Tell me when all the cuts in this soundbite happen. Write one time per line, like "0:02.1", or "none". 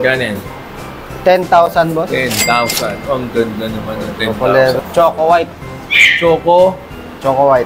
0:04.8